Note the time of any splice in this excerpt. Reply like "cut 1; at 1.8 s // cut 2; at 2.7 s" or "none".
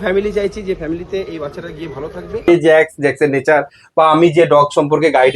cut 1; at 2.5 s